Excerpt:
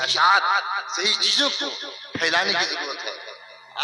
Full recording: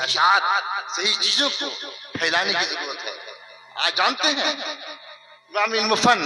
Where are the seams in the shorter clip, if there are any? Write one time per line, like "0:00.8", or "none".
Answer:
none